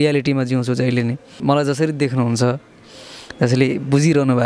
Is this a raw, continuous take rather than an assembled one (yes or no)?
no